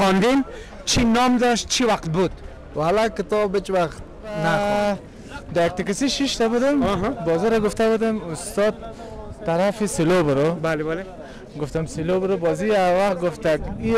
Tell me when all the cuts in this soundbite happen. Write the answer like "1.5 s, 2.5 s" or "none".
4.5 s